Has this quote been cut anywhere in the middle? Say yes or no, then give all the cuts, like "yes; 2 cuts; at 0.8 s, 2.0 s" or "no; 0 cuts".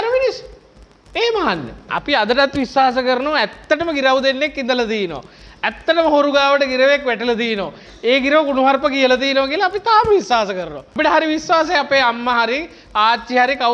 yes; 1 cut; at 1.9 s